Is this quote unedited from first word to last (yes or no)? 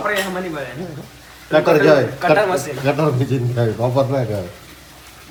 yes